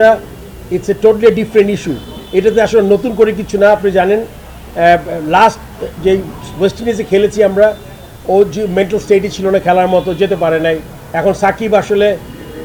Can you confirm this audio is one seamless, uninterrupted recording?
yes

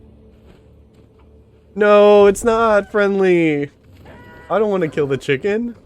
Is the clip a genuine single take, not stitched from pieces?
yes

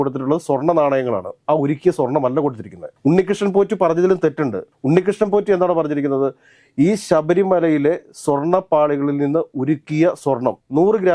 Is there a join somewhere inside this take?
no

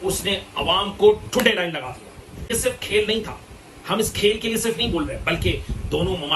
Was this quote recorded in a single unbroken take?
no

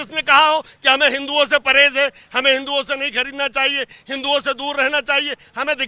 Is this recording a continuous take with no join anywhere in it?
yes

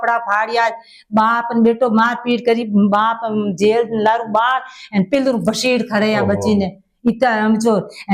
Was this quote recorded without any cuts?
yes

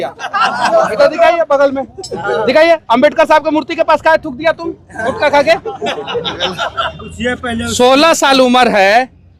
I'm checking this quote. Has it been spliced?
no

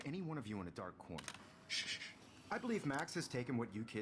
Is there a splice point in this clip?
yes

